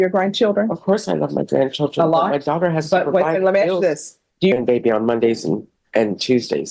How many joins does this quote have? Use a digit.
1